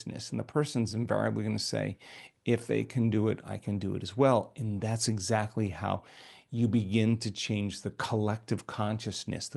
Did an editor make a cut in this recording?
no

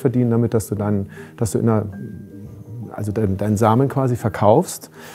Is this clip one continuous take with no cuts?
yes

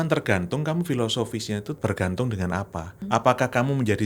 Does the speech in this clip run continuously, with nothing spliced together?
no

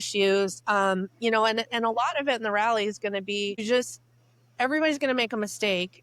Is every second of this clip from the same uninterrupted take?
no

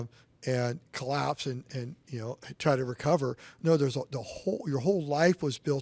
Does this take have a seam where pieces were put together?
no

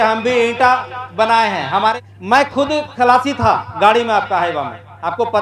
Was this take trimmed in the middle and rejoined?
yes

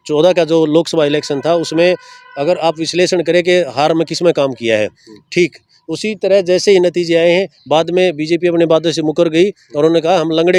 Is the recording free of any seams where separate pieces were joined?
yes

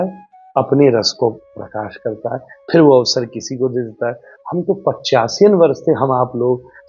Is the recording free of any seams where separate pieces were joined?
yes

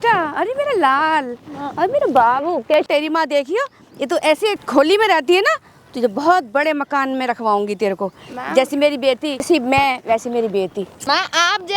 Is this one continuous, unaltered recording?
no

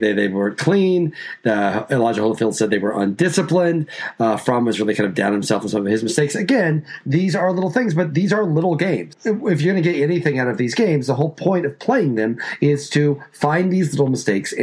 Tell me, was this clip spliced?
no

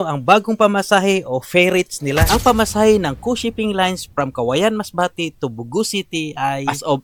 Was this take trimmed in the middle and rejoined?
no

